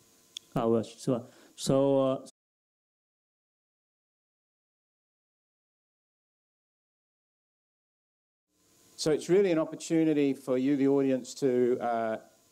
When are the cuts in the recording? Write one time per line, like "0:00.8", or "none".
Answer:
none